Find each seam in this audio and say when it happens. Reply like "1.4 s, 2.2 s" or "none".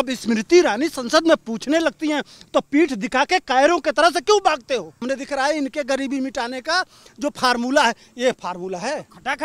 5.0 s

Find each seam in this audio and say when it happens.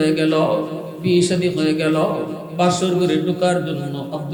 none

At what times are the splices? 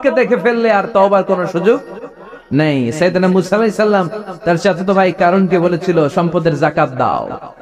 4.2 s

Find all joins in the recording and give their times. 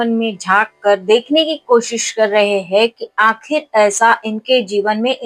none

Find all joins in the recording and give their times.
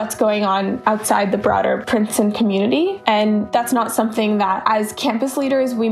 none

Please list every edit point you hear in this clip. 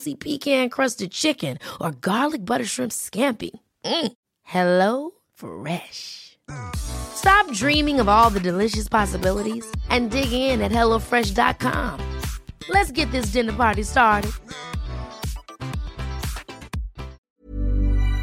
17.2 s

